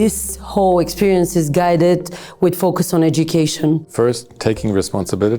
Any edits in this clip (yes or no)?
yes